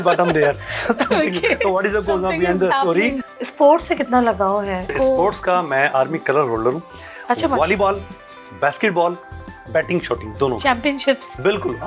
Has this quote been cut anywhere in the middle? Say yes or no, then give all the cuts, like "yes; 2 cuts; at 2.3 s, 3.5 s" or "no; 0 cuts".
yes; 2 cuts; at 3.3 s, 4.9 s